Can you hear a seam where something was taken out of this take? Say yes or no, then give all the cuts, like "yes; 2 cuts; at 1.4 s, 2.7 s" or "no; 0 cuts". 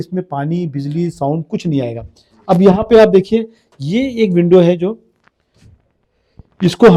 no; 0 cuts